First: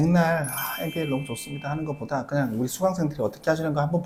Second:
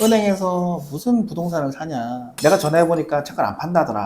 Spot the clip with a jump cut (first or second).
second